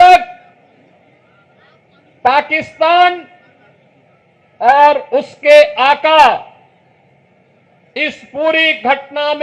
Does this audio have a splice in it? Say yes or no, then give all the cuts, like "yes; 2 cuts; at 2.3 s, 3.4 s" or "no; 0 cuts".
no; 0 cuts